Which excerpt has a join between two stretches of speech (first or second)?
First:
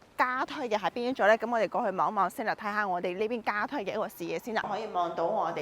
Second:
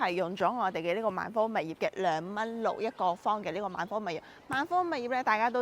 first